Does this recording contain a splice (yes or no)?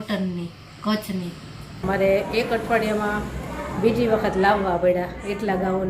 yes